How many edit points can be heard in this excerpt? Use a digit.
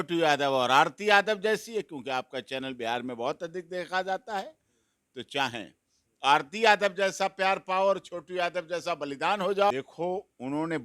1